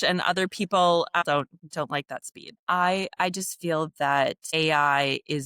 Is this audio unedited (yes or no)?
no